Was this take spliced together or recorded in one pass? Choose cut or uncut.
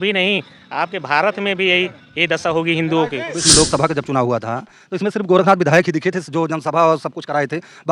cut